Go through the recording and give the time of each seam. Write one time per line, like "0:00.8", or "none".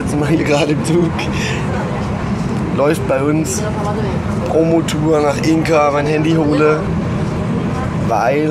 none